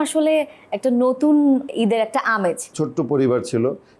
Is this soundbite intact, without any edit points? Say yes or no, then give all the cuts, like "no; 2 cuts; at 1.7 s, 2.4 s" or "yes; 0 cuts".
no; 2 cuts; at 1.7 s, 2.7 s